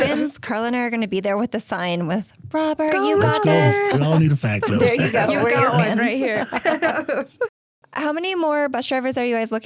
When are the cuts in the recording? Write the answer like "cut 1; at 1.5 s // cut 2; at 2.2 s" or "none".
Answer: none